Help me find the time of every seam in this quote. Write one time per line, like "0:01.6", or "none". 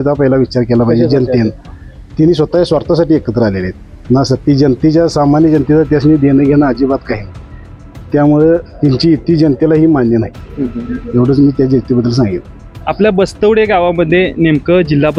none